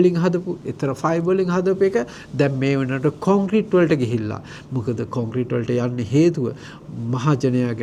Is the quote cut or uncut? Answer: uncut